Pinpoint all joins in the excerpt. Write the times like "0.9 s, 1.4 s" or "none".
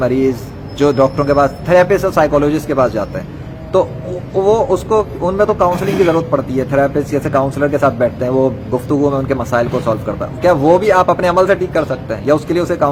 none